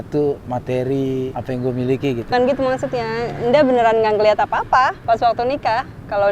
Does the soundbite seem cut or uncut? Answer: cut